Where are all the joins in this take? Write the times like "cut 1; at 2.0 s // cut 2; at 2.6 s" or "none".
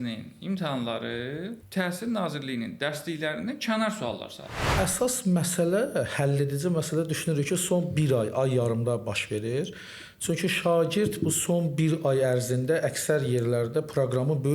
cut 1; at 1.6 s // cut 2; at 4.7 s